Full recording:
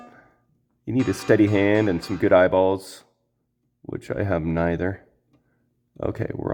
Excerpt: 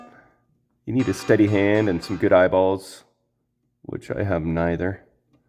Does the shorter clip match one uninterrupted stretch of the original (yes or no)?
yes